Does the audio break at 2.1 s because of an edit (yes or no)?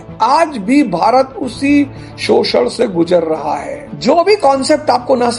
no